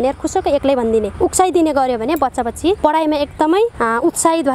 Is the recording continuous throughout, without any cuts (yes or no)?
yes